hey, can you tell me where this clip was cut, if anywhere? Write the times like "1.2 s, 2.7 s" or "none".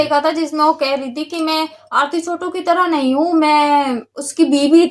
none